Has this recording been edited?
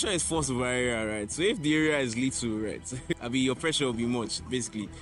no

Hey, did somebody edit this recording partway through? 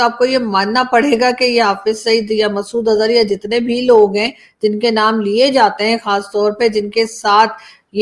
no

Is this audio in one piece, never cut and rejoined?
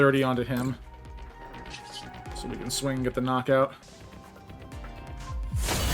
no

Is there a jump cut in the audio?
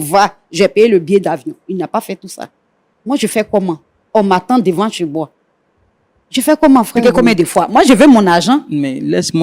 yes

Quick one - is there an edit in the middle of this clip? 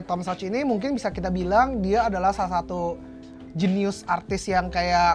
no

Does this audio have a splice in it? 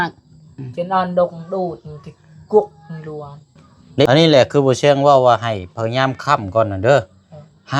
yes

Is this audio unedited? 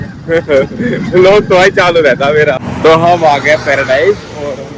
no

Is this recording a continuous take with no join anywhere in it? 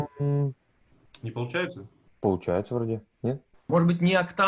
no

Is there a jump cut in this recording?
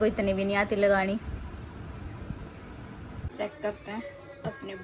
yes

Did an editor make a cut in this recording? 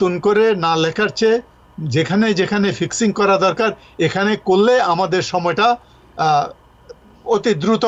no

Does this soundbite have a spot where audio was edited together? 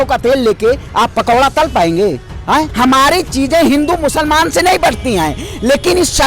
yes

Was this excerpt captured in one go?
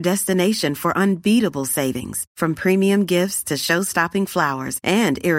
yes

